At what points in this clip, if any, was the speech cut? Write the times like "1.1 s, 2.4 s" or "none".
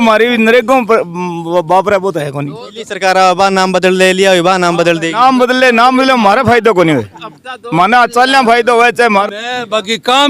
9.3 s